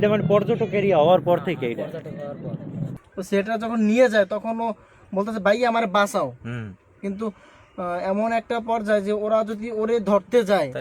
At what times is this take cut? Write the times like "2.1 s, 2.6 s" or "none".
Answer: 2.9 s